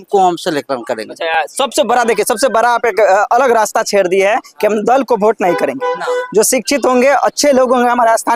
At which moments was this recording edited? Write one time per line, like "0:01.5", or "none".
none